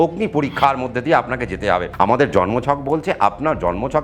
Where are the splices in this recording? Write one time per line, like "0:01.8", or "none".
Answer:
0:01.9